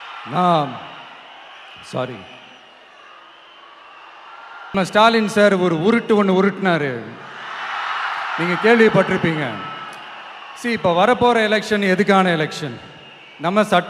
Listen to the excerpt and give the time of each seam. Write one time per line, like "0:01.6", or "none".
0:04.6